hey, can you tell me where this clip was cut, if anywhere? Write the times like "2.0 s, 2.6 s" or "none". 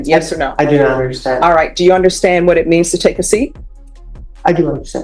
none